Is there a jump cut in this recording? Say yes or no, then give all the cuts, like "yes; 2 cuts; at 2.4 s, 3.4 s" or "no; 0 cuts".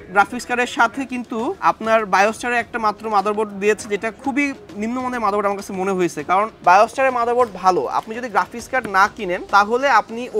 yes; 2 cuts; at 6.5 s, 9.4 s